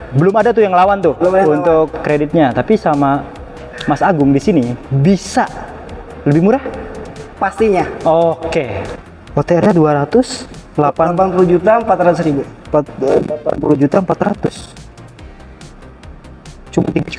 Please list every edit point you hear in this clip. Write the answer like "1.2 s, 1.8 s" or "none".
8.8 s